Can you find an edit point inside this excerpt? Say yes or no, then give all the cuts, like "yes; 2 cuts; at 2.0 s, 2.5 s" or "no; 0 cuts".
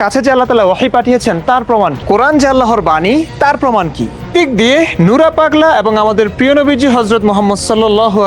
yes; 2 cuts; at 2.0 s, 4.3 s